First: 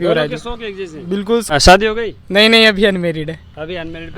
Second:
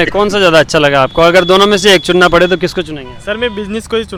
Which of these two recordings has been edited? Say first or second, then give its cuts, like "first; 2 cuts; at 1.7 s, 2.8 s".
first; 1 cut; at 1.5 s